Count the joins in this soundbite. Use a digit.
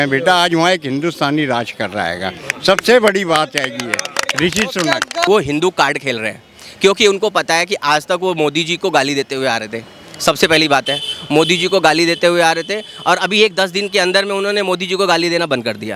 1